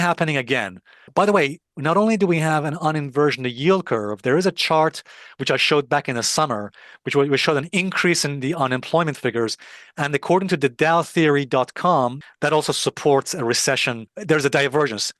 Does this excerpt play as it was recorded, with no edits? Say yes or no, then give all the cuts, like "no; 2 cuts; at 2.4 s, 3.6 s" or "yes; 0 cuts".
no; 3 cuts; at 1.1 s, 12.2 s, 14.1 s